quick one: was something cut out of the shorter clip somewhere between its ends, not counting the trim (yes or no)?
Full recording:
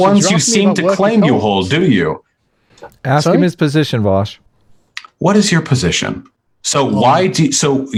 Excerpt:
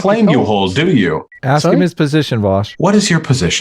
yes